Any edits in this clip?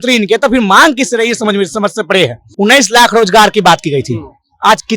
yes; 1 cut; at 2.4 s

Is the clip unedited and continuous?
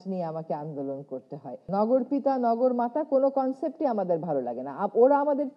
no; 1 cut; at 1.5 s

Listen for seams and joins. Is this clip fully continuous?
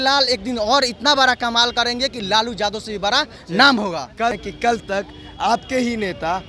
no; 1 cut; at 4.4 s

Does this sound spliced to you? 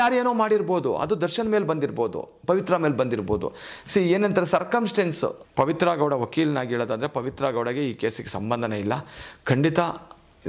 yes; 1 cut; at 5.4 s

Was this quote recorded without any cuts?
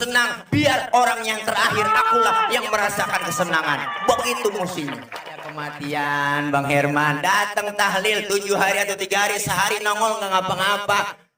no; 1 cut; at 5.7 s

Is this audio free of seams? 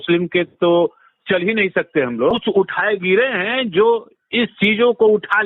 no; 1 cut; at 2.4 s

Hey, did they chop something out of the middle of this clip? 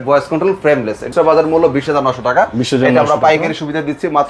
yes; 1 cut; at 1.1 s

